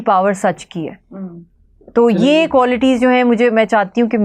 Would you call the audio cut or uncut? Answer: uncut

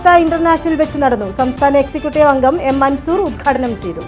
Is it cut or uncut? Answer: uncut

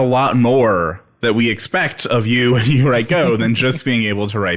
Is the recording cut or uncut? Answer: uncut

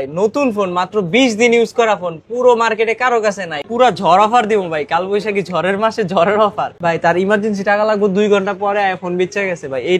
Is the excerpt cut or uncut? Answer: cut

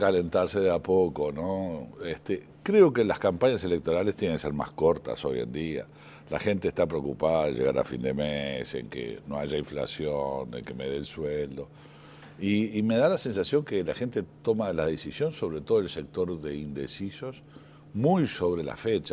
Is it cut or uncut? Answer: uncut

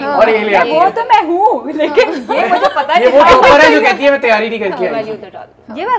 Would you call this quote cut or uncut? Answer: uncut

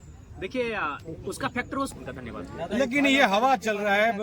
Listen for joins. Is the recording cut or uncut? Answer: cut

